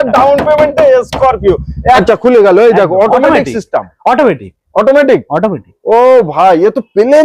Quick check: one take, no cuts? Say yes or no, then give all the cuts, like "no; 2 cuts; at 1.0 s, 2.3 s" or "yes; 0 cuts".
no; 1 cut; at 2.0 s